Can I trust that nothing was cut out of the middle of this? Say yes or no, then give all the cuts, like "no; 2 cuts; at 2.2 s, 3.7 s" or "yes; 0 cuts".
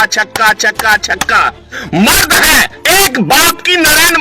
no; 1 cut; at 1.8 s